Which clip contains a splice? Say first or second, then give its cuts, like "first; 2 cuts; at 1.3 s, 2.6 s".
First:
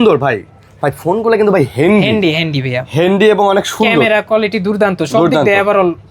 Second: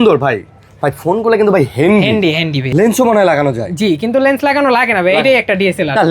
second; 1 cut; at 2.6 s